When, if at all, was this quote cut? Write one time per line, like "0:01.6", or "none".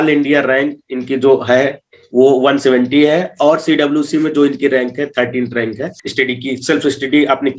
0:06.0